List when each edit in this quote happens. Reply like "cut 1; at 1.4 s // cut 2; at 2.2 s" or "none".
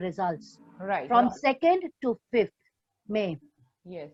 none